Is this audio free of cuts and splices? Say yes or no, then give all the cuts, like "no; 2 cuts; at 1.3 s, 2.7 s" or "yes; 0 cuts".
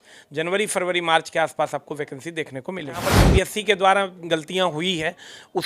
no; 1 cut; at 3.1 s